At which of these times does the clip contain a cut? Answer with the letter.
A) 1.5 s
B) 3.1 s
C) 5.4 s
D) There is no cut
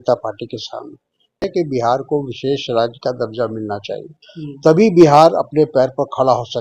A